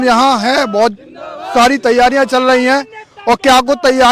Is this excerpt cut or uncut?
uncut